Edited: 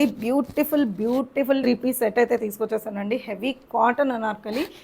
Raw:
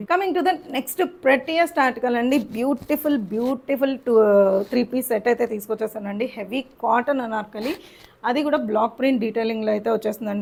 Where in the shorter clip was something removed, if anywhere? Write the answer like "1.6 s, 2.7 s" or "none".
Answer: 1.6 s